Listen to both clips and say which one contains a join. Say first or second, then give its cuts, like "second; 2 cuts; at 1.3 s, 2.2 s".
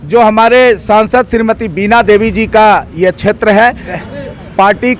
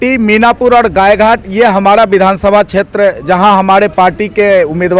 first; 1 cut; at 3.9 s